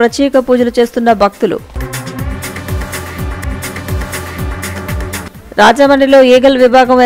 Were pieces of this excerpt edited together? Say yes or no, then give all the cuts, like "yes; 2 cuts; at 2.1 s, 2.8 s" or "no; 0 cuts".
no; 0 cuts